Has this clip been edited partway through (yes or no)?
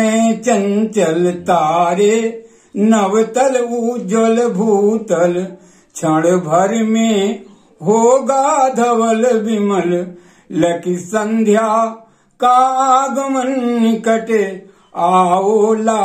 no